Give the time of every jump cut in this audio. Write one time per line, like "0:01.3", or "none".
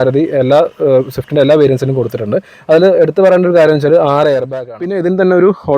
0:04.5